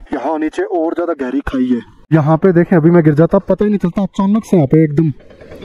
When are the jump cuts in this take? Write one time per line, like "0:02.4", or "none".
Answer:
0:01.9